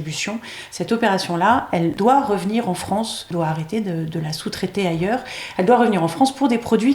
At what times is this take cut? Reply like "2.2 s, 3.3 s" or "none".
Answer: 1.9 s, 3.3 s